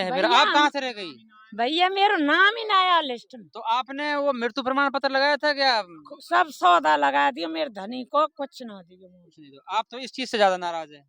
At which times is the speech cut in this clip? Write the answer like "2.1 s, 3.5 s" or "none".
none